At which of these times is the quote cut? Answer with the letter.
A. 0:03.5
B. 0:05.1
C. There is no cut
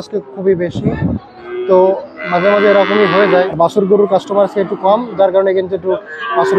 A